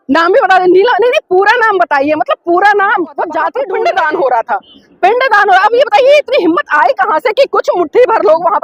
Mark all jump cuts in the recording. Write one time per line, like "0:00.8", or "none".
0:03.5